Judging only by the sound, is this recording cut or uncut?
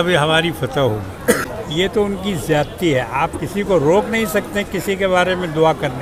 uncut